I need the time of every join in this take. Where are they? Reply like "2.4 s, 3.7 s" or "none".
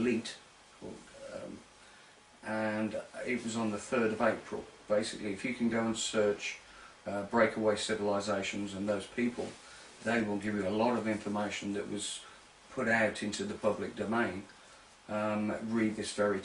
none